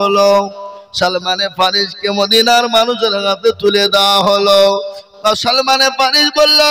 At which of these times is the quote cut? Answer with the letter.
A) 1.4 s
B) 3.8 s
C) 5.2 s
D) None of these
D